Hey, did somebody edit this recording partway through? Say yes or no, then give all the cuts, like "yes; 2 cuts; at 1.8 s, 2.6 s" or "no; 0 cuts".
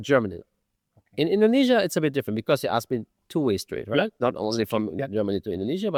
no; 0 cuts